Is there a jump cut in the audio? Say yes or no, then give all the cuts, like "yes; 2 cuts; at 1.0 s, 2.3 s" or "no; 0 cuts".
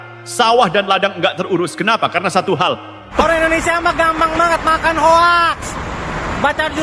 yes; 1 cut; at 3.2 s